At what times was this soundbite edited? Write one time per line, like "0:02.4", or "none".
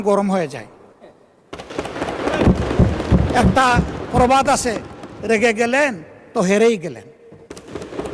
none